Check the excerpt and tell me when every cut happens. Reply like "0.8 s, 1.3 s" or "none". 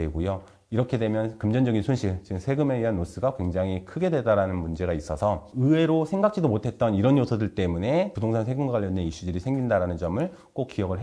none

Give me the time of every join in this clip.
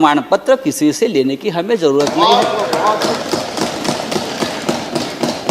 none

